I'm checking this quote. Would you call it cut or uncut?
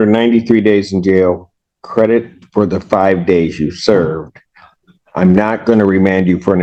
uncut